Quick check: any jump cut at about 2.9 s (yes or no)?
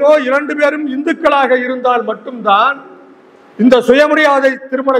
no